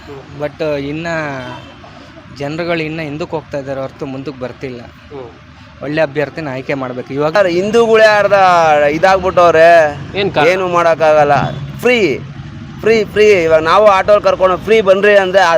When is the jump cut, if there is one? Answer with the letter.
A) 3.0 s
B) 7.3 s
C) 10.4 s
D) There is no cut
B